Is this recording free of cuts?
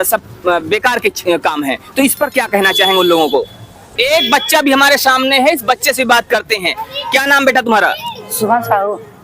no; 1 cut; at 3.8 s

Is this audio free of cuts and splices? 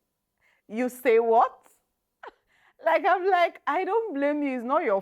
yes; 0 cuts

